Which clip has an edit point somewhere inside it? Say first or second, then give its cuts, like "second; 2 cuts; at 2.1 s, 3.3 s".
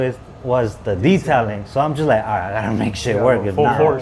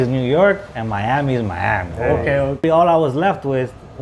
second; 1 cut; at 2.6 s